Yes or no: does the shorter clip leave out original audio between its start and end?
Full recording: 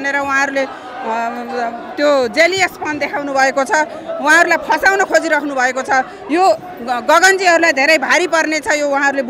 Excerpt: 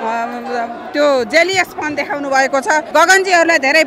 yes